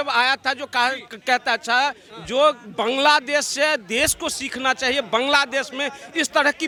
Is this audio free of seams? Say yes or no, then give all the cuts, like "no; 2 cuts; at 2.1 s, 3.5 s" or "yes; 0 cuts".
yes; 0 cuts